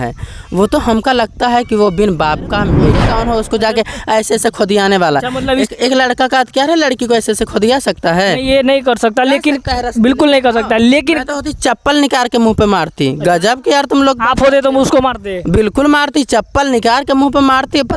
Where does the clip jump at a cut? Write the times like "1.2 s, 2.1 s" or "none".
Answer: 3.1 s